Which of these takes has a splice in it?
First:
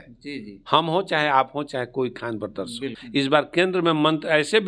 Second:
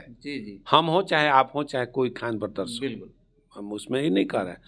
first; 1 cut; at 3.0 s

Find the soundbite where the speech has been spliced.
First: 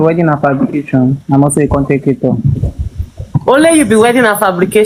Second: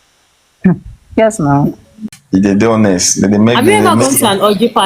second; 1 cut; at 2.1 s

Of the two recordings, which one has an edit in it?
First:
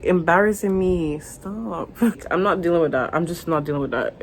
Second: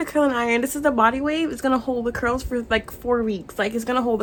first; 1 cut; at 2.2 s

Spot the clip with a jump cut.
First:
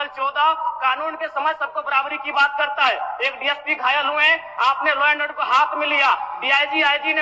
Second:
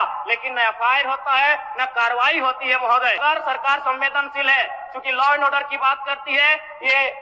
second; 1 cut; at 3.2 s

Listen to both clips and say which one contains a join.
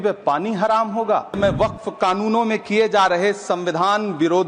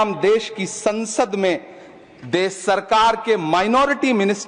first; 1 cut; at 1.4 s

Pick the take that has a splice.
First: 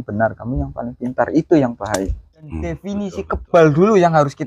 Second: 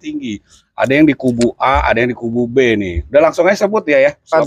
first; 1 cut; at 2.9 s

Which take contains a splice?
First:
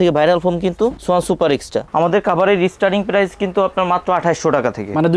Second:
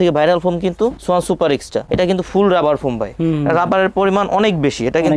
first; 1 cut; at 1.8 s

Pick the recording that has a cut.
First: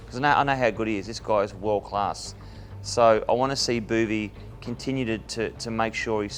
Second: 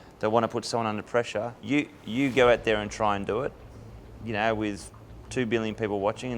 second; 1 cut; at 1.6 s

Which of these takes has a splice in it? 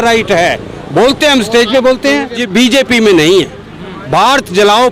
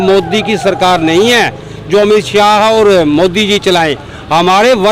first; 1 cut; at 2.4 s

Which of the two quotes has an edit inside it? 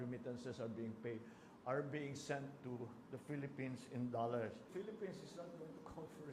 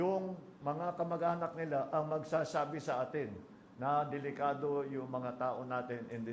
first; 1 cut; at 4.7 s

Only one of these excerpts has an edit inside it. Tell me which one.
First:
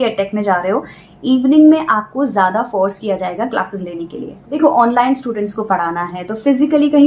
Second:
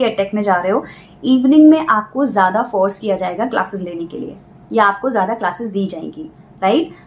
first; 1 cut; at 4.5 s

